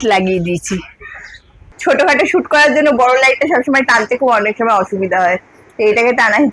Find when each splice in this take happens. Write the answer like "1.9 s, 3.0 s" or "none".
1.7 s